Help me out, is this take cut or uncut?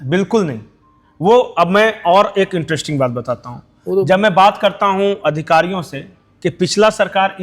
uncut